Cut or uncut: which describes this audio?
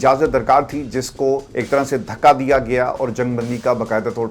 cut